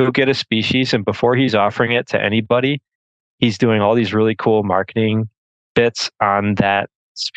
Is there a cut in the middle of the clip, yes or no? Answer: no